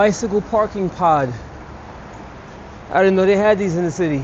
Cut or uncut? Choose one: uncut